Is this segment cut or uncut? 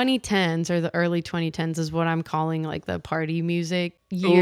uncut